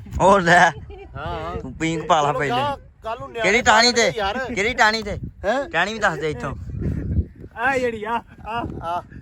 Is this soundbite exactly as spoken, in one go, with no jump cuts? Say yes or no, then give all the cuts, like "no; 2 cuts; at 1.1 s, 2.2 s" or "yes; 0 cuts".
yes; 0 cuts